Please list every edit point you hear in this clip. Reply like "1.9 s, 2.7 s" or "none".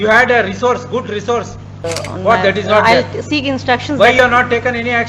1.9 s